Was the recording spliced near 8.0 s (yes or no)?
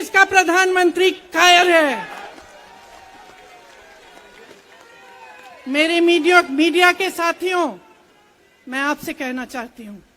no